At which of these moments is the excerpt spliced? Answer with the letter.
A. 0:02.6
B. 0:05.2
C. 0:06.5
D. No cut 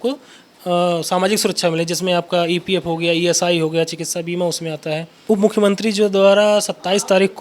B